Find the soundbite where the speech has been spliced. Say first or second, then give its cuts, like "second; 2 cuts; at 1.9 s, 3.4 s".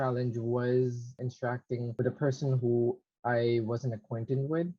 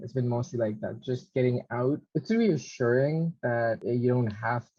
second; 2 cuts; at 2.0 s, 3.8 s